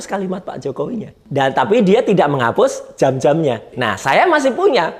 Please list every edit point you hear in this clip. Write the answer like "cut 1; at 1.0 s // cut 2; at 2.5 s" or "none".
cut 1; at 1.2 s // cut 2; at 3.8 s

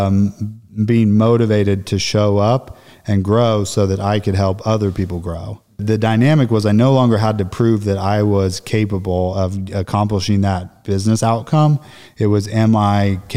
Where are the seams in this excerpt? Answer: cut 1; at 5.8 s

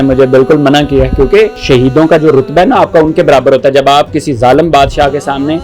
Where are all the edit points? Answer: cut 1; at 1.6 s

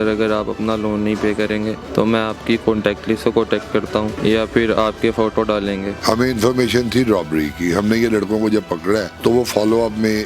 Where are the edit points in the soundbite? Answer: cut 1; at 1.8 s // cut 2; at 4.2 s // cut 3; at 5.9 s // cut 4; at 9.1 s

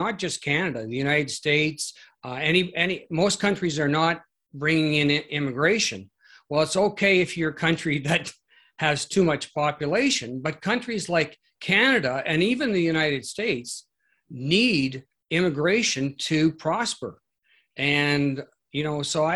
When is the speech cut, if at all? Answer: none

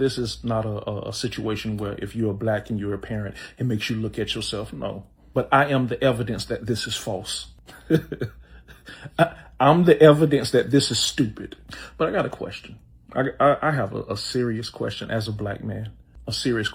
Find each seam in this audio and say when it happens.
none

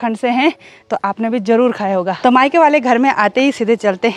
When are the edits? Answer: cut 1; at 2.2 s

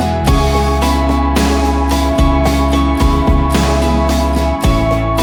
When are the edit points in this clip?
none

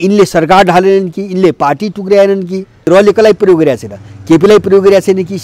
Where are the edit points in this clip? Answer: cut 1; at 2.9 s

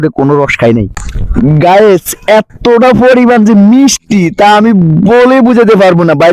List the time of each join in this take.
cut 1; at 1.0 s

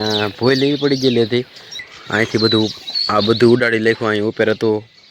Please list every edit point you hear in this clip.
cut 1; at 2.0 s

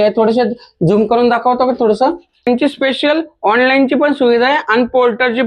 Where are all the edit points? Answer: cut 1; at 2.5 s

